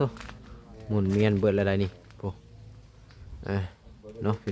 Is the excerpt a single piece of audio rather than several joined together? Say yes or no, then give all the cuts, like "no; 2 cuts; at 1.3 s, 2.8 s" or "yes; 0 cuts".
yes; 0 cuts